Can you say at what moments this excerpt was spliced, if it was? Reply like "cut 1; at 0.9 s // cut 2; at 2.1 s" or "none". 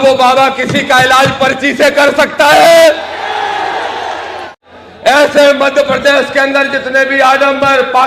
cut 1; at 4.5 s